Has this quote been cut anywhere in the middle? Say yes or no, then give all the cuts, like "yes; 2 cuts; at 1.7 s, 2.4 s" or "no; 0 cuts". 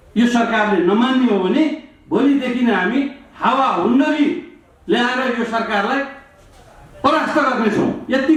no; 0 cuts